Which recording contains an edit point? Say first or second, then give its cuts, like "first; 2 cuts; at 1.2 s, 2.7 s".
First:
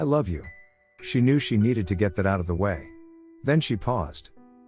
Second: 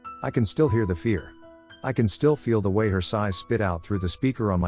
first; 1 cut; at 0.9 s